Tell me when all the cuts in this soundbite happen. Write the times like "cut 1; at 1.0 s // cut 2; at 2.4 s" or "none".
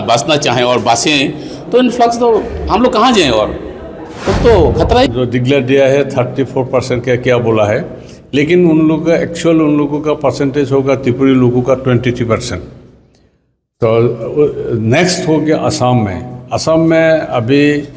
cut 1; at 5.1 s